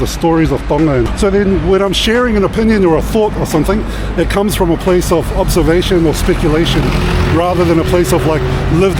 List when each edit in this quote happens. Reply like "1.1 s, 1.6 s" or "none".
1.1 s